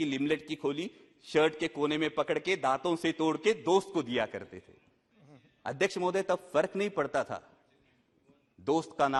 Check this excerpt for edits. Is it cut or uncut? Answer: uncut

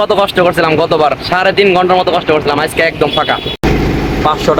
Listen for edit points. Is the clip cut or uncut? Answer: uncut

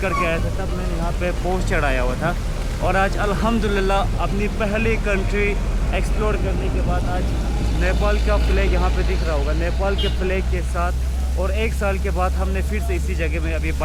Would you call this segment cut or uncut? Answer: uncut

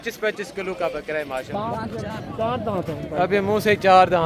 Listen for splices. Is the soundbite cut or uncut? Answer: cut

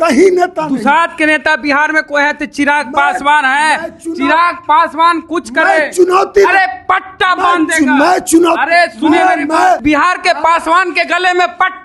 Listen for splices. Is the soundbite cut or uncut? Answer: cut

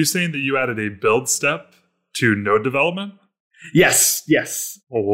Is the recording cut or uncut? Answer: uncut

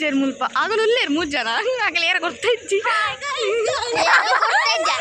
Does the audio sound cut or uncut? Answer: uncut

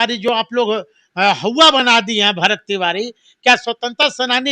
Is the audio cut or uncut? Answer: uncut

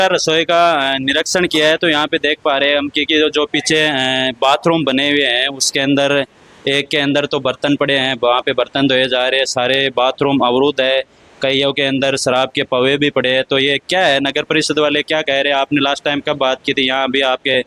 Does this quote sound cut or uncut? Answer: uncut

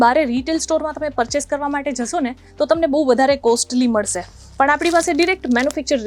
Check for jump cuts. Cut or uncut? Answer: uncut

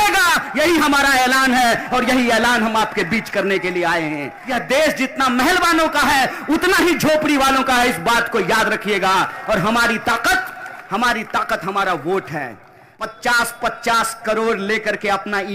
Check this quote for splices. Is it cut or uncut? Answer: cut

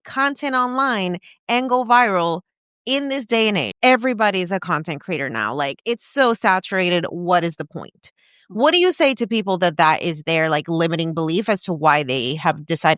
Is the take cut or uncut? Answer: cut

